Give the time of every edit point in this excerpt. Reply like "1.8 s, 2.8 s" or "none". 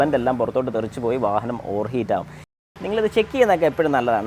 2.6 s